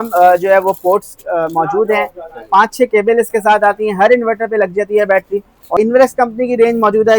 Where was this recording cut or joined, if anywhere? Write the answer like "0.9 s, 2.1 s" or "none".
5.8 s